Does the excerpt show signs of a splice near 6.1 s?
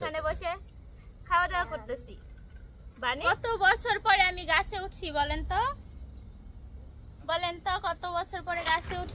no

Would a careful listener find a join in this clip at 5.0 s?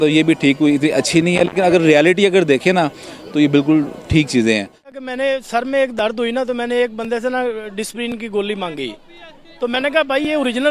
yes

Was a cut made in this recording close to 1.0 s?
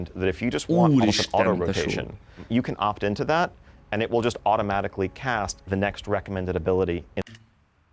no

